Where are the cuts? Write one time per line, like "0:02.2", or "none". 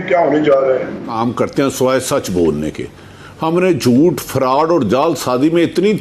0:01.1